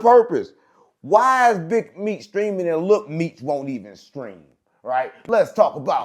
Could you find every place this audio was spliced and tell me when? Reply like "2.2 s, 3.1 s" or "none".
5.2 s

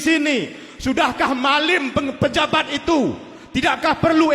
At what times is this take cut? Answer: none

